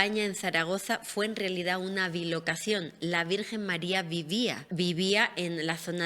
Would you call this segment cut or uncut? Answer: cut